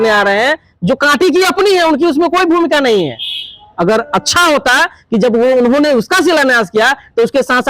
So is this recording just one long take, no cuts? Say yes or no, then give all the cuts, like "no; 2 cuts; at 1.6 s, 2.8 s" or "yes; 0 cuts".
yes; 0 cuts